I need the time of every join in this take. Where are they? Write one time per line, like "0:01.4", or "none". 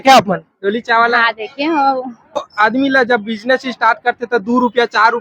0:02.4

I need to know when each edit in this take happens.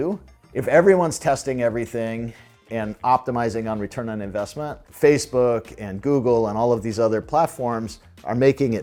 none

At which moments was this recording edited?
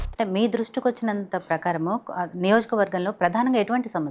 none

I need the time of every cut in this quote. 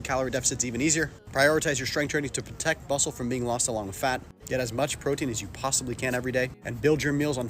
0:01.2
0:04.3
0:06.3

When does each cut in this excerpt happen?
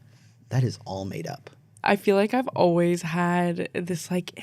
0:01.7

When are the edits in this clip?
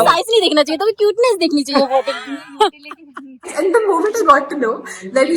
0:03.5

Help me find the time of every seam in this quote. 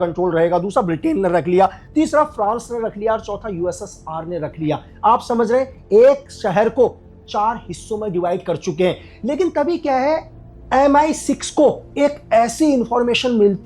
none

